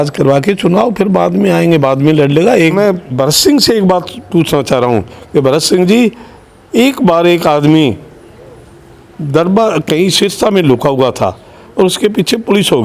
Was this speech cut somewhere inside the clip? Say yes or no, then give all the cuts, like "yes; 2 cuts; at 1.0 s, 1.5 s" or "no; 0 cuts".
yes; 1 cut; at 2.7 s